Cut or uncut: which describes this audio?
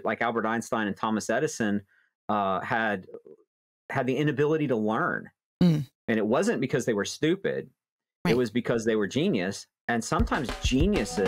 cut